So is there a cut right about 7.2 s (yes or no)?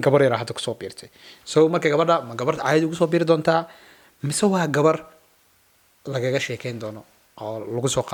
no